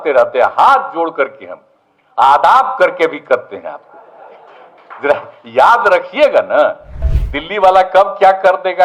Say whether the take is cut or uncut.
cut